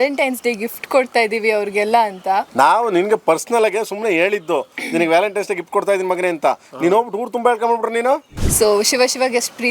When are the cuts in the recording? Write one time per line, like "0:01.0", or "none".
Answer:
0:08.4

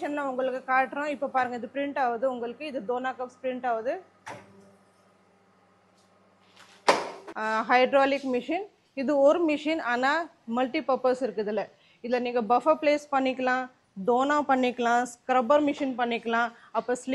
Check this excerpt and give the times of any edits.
0:07.2

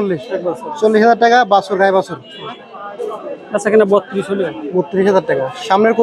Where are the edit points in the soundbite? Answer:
0:02.7

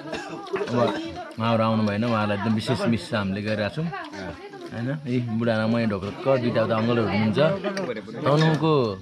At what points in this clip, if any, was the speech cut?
0:07.8

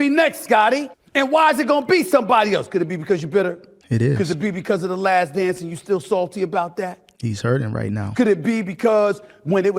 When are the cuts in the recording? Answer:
0:01.0
0:03.7

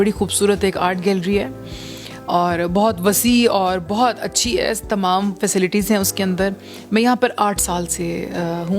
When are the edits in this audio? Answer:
none

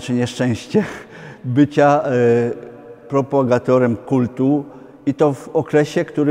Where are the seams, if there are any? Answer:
none

